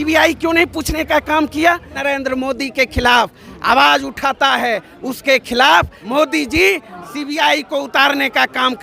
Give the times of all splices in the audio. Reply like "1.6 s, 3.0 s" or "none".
1.9 s, 6.0 s, 7.0 s